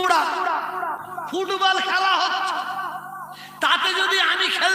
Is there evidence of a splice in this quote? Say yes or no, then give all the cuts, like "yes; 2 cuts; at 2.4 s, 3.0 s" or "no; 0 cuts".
no; 0 cuts